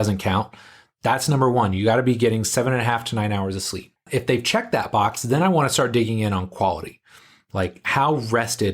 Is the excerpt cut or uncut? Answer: cut